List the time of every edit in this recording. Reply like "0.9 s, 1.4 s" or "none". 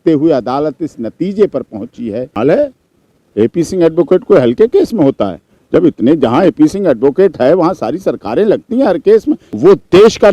2.3 s, 9.5 s

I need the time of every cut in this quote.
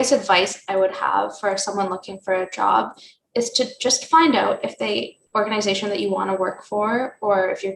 5.2 s

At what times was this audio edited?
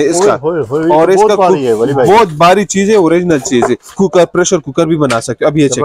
3.9 s

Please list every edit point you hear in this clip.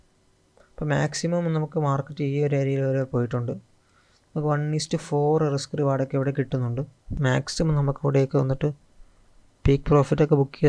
7.1 s

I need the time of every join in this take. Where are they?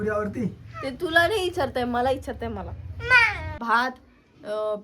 3.5 s

